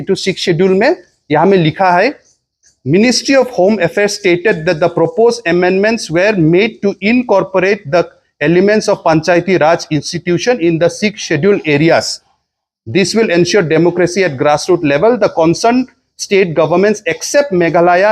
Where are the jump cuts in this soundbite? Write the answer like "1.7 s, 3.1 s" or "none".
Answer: none